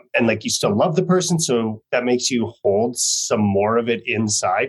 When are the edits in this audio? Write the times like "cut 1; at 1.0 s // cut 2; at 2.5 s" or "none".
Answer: none